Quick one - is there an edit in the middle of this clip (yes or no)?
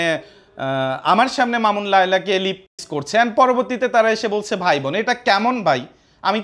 no